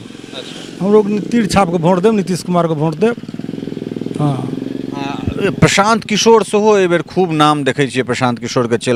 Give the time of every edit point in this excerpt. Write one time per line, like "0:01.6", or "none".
none